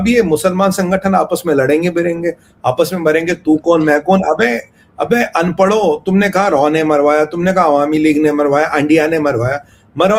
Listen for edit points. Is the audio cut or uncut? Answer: uncut